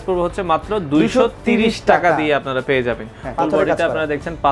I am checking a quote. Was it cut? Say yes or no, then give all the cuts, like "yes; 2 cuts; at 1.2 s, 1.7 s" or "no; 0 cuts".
yes; 1 cut; at 3.3 s